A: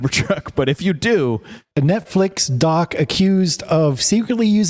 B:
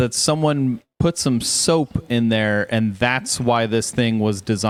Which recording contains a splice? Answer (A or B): A